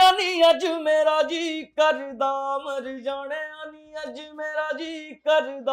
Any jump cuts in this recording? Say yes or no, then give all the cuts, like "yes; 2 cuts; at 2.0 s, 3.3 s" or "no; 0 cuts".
no; 0 cuts